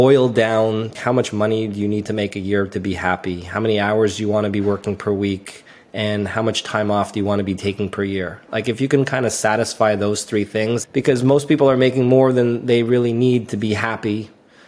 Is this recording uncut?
no; 2 cuts; at 1.0 s, 10.8 s

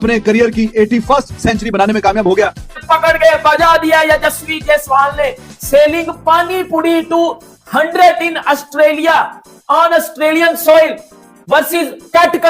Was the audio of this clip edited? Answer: yes; 1 cut; at 2.7 s

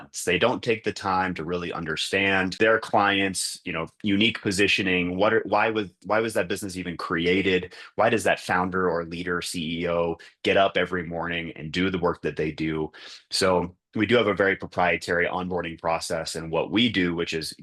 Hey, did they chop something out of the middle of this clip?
no; 0 cuts

